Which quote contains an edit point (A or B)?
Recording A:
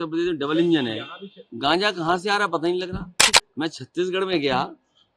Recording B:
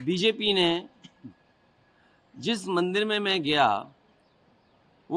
A